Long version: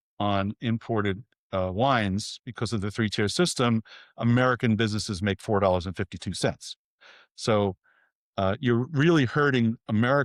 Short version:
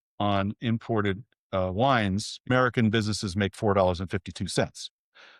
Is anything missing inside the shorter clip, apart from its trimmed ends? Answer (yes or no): yes